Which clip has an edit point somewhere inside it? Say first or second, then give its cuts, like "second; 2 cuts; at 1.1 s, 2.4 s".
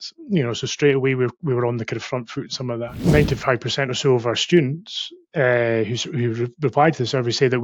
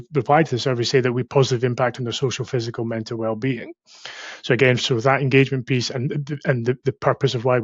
first; 1 cut; at 3.0 s